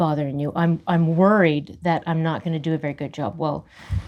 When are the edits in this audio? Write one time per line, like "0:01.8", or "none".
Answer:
none